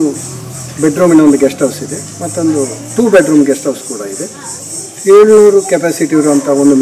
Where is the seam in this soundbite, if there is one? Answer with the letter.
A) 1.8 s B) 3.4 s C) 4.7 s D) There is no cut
C